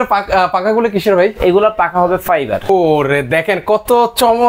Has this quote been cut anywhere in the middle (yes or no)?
yes